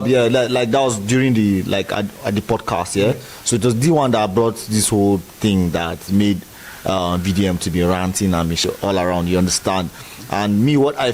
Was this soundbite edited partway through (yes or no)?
yes